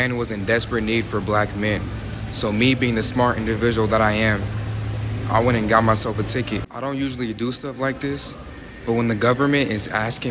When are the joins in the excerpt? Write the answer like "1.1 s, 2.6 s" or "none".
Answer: none